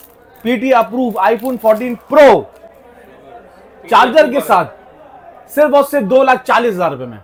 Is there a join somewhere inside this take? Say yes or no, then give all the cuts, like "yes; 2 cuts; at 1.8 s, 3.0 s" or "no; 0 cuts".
no; 0 cuts